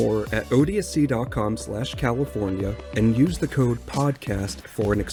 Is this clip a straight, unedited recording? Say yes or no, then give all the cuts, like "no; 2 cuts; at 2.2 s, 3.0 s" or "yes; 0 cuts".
yes; 0 cuts